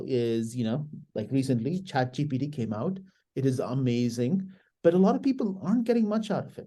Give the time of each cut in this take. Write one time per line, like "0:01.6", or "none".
none